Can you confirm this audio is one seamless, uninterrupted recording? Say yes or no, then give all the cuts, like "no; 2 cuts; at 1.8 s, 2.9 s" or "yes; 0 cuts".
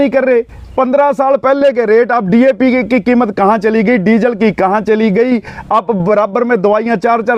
yes; 0 cuts